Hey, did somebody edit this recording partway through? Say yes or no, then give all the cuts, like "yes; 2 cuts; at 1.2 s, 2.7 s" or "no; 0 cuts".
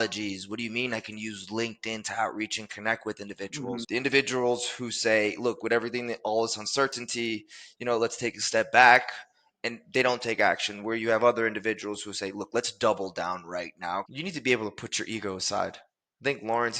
yes; 2 cuts; at 3.8 s, 14.1 s